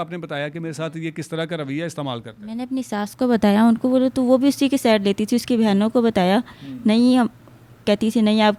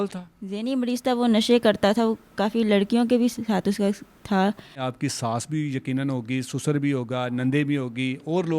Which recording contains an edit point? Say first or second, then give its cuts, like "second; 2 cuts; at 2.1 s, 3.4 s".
second; 1 cut; at 4.8 s